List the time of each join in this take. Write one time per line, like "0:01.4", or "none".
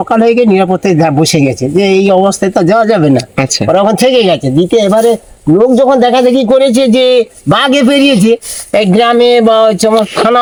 none